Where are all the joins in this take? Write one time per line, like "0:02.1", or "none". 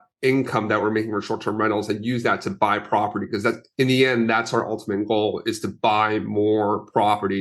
none